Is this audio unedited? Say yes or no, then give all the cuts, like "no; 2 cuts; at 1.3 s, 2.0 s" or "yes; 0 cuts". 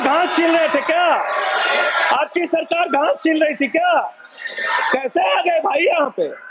yes; 0 cuts